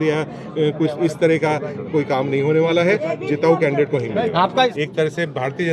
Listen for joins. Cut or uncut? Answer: cut